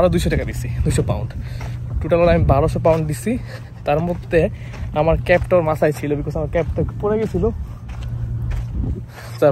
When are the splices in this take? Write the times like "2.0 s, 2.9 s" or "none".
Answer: none